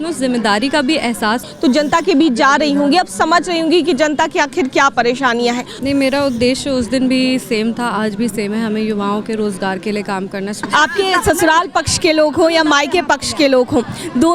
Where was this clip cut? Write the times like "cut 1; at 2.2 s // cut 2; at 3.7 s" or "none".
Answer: cut 1; at 1.5 s // cut 2; at 5.7 s // cut 3; at 10.7 s

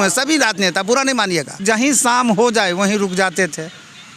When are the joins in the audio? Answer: cut 1; at 1.6 s

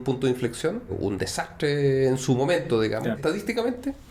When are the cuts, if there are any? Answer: cut 1; at 1.0 s // cut 2; at 3.2 s

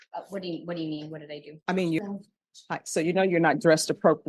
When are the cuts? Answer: cut 1; at 2.0 s

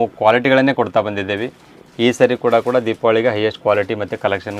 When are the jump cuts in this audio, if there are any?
none

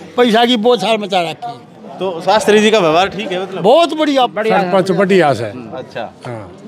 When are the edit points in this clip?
cut 1; at 4.3 s

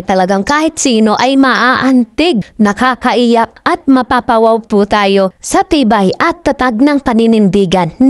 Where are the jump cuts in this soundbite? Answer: cut 1; at 2.5 s

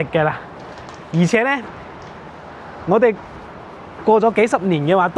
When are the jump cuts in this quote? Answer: none

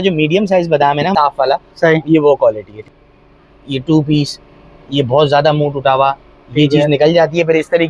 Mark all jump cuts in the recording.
cut 1; at 1.1 s // cut 2; at 2.8 s

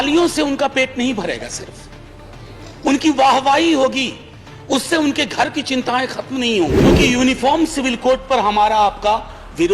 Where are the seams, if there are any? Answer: cut 1; at 6.8 s

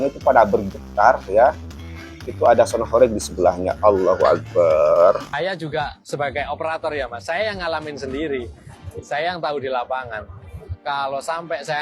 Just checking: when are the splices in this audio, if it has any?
cut 1; at 5.3 s

